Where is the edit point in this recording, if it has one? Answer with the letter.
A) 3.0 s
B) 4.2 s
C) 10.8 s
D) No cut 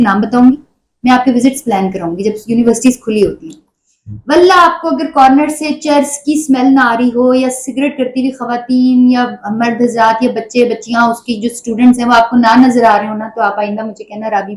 D